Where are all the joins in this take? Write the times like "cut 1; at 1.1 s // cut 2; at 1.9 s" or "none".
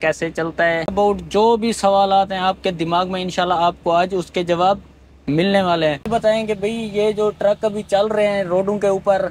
cut 1; at 0.9 s // cut 2; at 6.1 s